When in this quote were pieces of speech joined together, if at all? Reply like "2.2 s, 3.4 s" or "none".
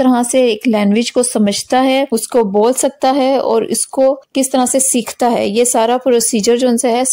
2.1 s, 4.2 s

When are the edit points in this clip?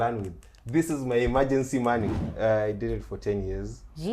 2.3 s

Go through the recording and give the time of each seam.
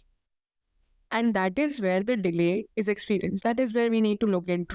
3.4 s

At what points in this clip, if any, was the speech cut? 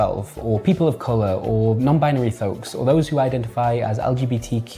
none

